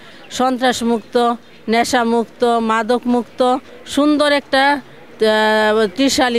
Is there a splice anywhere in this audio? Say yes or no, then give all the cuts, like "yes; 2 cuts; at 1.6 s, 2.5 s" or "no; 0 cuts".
no; 0 cuts